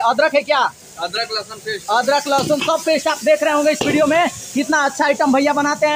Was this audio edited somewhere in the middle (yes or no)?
no